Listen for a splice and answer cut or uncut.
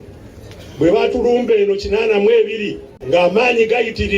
cut